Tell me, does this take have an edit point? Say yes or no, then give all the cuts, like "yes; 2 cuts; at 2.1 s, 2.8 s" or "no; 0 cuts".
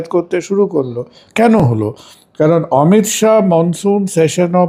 no; 0 cuts